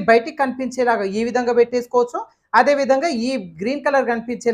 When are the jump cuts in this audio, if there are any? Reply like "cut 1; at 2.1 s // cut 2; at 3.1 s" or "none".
none

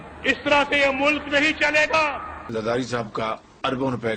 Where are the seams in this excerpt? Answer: cut 1; at 2.4 s

